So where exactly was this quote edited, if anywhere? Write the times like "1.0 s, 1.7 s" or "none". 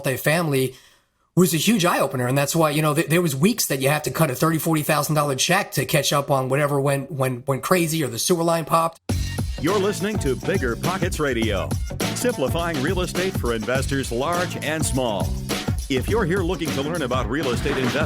8.9 s